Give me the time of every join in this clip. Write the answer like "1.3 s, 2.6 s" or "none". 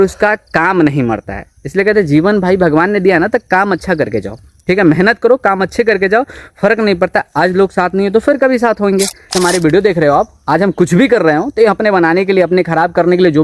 9.3 s